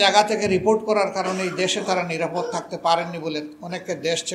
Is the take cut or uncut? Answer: uncut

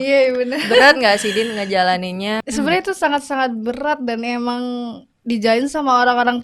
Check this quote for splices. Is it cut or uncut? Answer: cut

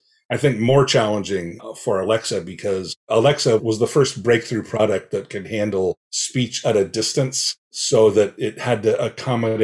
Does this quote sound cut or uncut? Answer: uncut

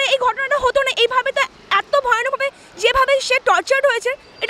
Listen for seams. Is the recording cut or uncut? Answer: uncut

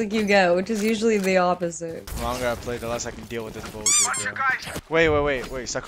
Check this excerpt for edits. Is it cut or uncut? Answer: cut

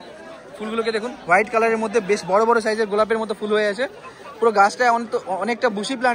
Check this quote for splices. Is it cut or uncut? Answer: uncut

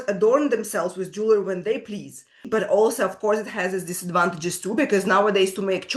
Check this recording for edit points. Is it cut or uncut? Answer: cut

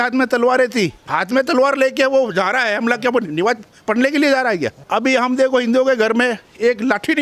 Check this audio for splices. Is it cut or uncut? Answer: cut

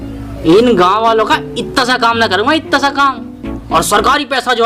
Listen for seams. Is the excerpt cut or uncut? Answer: uncut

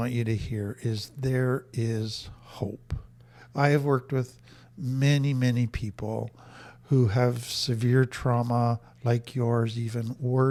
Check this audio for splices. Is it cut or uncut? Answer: uncut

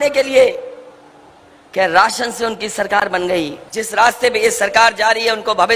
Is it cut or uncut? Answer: cut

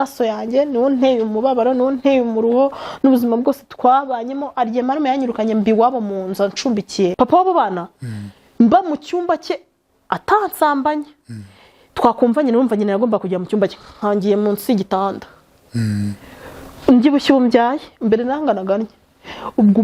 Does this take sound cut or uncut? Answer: cut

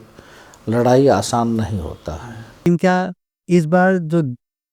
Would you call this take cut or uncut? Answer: cut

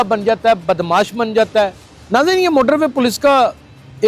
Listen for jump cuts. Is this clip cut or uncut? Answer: cut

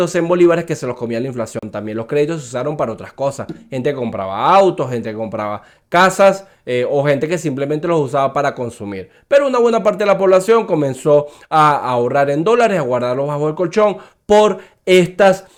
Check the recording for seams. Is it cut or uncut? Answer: uncut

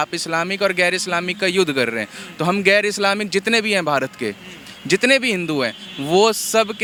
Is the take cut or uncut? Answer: uncut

